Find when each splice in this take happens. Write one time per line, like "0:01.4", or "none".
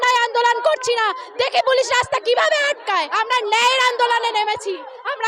0:03.1